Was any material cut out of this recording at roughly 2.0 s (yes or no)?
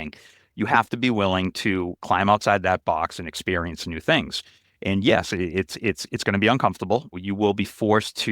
yes